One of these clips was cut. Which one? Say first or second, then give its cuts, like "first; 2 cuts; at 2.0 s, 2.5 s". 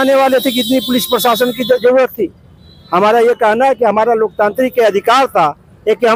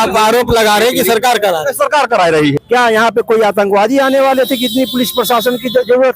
second; 1 cut; at 2.6 s